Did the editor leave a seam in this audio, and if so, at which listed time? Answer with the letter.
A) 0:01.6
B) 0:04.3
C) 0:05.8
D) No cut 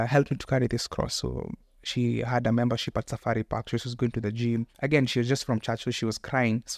D